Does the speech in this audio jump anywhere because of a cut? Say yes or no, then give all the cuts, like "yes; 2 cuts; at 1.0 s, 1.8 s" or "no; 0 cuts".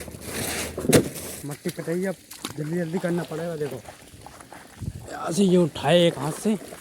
yes; 1 cut; at 1.3 s